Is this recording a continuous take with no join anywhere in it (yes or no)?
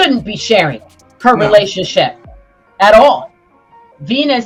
yes